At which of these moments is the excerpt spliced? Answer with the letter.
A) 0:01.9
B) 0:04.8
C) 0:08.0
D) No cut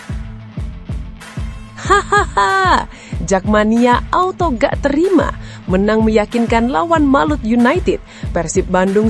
A